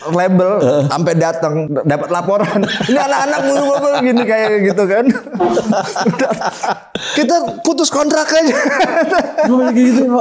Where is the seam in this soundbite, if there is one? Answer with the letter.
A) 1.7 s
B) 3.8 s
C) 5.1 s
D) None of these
A